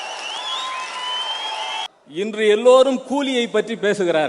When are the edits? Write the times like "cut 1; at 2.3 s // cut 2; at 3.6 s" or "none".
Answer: cut 1; at 1.9 s